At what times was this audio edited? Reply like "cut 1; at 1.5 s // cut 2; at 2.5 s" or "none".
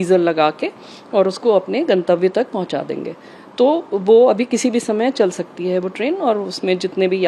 none